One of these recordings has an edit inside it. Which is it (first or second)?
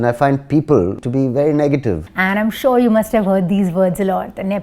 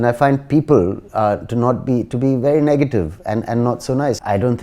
first